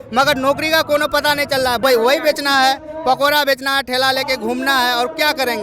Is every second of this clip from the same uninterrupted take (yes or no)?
no